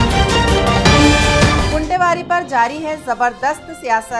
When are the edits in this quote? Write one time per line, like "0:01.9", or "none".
none